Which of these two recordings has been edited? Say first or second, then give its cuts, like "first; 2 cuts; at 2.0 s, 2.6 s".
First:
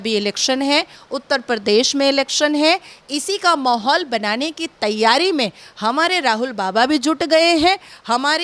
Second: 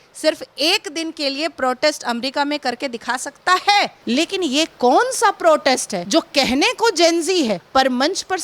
second; 3 cuts; at 4.0 s, 6.0 s, 7.6 s